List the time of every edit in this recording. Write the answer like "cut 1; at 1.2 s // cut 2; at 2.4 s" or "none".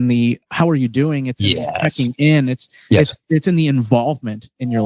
none